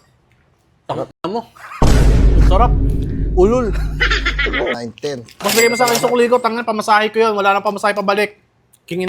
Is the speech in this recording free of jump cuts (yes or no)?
no